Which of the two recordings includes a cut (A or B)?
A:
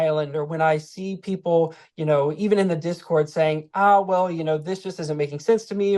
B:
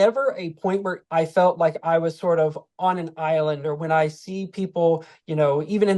B